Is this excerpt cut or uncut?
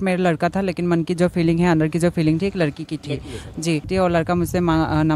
cut